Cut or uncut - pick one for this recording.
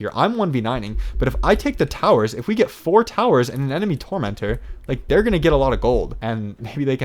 cut